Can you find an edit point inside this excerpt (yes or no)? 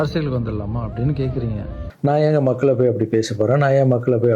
yes